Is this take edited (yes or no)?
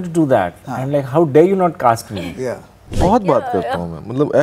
yes